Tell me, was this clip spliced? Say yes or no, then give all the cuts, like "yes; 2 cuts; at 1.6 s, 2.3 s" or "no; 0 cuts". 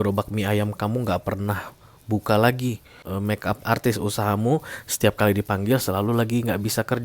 yes; 1 cut; at 2.9 s